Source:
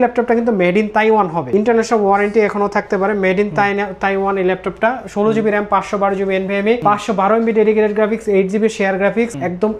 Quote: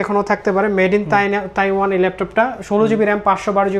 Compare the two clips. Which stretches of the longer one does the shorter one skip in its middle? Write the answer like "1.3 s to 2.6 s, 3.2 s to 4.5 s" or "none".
none